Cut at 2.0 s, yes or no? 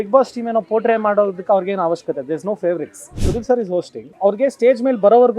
no